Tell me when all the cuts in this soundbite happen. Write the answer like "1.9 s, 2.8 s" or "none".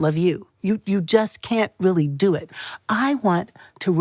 2.6 s